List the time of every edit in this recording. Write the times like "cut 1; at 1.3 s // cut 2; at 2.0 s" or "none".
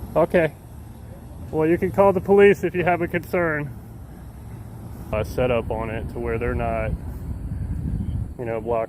cut 1; at 5.1 s